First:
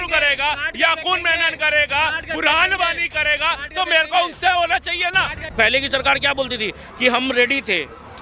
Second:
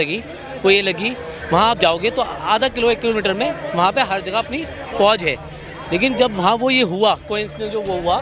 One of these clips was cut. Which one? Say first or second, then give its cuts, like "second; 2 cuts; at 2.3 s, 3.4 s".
first; 1 cut; at 5.4 s